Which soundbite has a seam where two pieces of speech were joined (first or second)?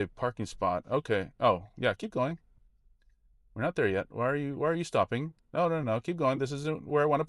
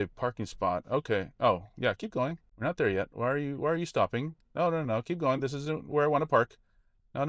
second